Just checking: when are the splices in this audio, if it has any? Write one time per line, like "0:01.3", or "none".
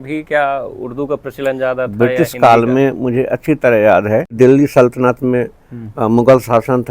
0:04.3